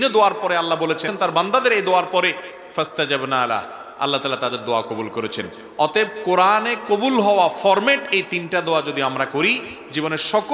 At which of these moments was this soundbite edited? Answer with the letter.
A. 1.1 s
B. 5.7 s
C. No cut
A